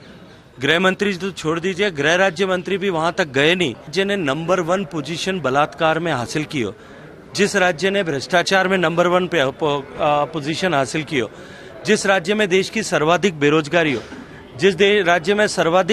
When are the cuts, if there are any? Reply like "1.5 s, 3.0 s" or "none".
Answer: 3.9 s